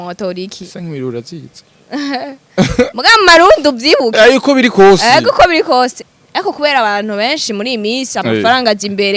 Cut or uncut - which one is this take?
cut